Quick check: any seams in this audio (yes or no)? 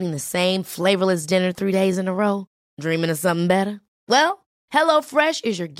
no